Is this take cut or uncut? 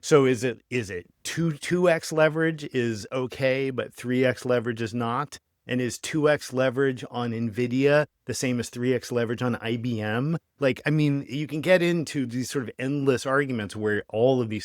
uncut